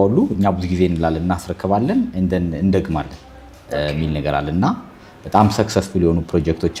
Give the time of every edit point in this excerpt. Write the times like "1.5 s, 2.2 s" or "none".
none